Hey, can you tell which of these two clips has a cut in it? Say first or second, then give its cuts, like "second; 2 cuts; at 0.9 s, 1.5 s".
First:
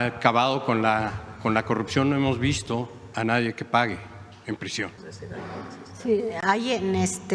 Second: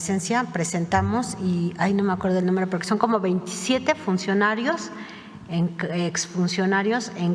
first; 2 cuts; at 3.0 s, 5.0 s